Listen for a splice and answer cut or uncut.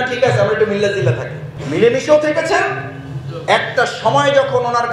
uncut